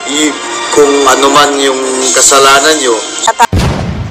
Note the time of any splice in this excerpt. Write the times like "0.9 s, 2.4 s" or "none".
3.2 s